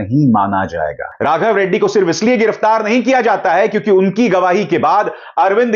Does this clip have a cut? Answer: yes; 1 cut; at 1.0 s

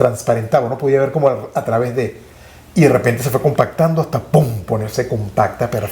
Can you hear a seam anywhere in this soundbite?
no; 0 cuts

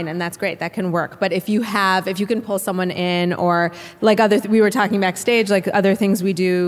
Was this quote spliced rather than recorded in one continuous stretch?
yes; 1 cut; at 3.9 s

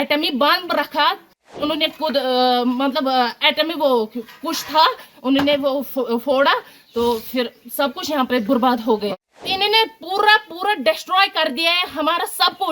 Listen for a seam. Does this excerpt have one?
yes; 2 cuts; at 1.5 s, 9.1 s

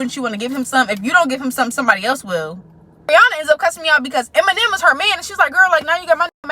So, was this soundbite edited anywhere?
yes; 1 cut; at 3.1 s

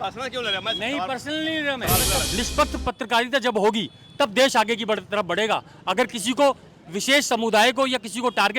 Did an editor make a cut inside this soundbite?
yes; 1 cut; at 2.2 s

